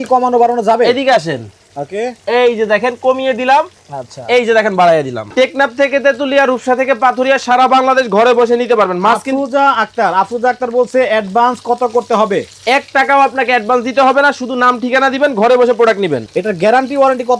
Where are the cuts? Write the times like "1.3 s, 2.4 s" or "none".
5.2 s, 16.3 s